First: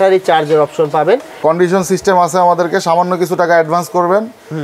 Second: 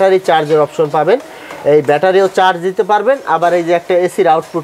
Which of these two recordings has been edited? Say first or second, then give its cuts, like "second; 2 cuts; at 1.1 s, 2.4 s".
first; 1 cut; at 1.4 s